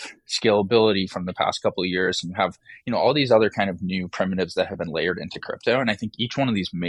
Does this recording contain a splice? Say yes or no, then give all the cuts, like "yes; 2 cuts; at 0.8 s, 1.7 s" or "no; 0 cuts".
no; 0 cuts